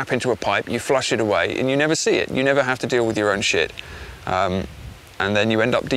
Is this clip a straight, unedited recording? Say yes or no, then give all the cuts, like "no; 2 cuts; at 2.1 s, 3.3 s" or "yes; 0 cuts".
yes; 0 cuts